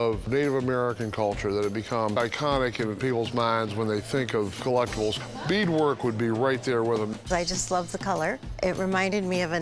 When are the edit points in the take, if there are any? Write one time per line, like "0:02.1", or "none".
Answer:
0:02.1
0:05.2
0:07.1
0:08.5